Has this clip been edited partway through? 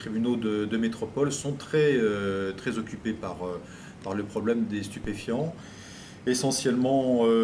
yes; 1 cut; at 2.0 s

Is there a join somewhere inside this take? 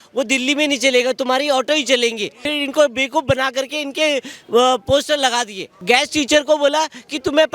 yes; 2 cuts; at 2.4 s, 5.8 s

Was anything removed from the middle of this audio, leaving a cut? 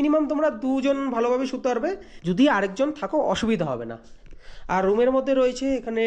no; 0 cuts

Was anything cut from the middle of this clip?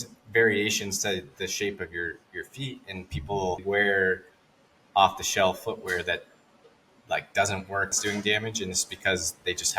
yes; 2 cuts; at 3.6 s, 8.0 s

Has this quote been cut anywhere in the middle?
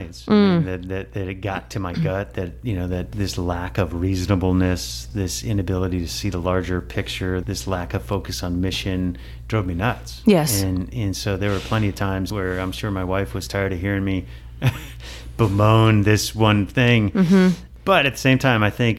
no; 0 cuts

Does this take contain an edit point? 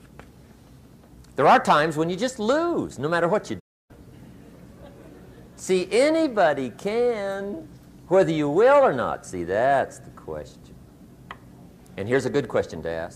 no; 0 cuts

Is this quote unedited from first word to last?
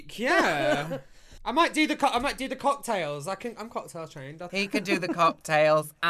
no; 2 cuts; at 1.0 s, 4.4 s

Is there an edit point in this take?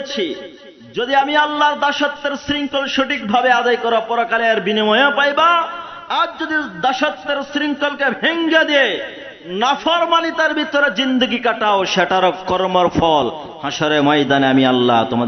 no; 0 cuts

